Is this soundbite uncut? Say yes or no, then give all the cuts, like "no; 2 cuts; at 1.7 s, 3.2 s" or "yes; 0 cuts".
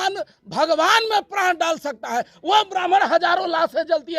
yes; 0 cuts